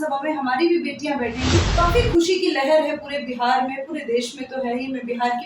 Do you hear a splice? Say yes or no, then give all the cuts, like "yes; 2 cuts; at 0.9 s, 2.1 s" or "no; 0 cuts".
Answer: yes; 1 cut; at 1.7 s